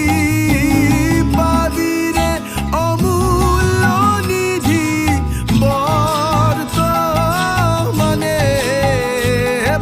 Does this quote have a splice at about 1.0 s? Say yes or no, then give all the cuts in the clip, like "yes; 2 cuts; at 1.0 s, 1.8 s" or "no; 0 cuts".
no; 0 cuts